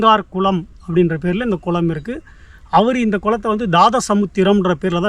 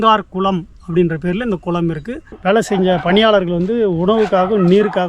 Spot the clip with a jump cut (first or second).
second